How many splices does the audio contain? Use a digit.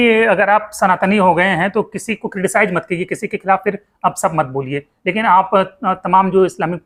0